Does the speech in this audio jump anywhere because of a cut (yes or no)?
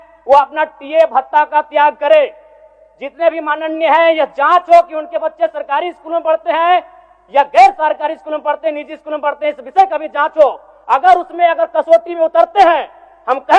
no